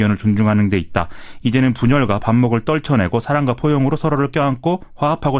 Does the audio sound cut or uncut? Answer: uncut